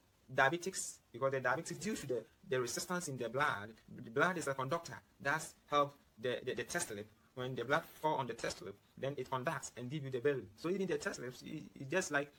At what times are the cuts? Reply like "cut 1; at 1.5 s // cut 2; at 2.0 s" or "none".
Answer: none